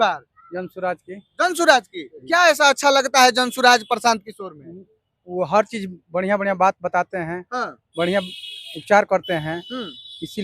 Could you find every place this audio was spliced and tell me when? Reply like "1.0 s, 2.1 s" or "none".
none